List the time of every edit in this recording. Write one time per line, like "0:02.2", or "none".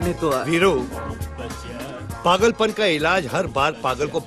0:01.5